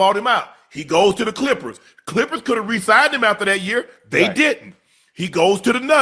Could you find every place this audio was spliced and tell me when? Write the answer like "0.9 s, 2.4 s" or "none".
none